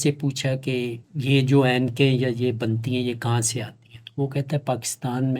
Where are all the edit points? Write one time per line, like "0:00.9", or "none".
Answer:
0:01.1